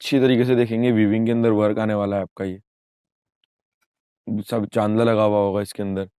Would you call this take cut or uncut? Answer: uncut